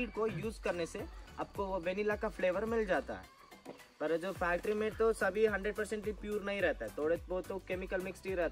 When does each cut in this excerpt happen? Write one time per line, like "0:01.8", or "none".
none